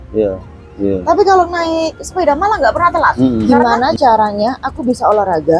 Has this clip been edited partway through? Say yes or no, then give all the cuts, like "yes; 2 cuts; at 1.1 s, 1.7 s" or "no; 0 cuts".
yes; 1 cut; at 3.4 s